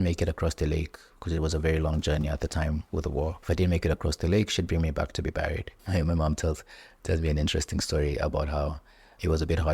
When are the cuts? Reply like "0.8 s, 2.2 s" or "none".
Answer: 3.4 s, 5.7 s